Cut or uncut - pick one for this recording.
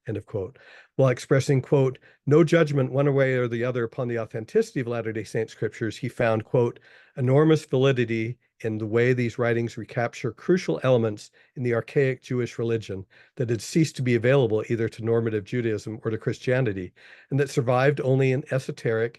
uncut